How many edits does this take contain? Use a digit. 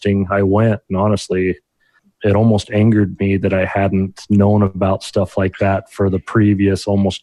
1